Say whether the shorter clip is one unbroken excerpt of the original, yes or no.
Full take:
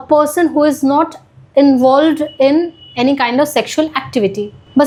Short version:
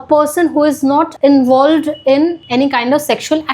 no